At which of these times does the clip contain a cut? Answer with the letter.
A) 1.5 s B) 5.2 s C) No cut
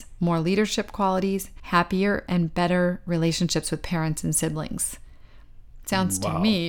A